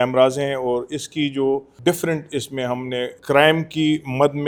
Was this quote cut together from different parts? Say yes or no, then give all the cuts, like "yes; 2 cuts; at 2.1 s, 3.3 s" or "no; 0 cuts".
no; 0 cuts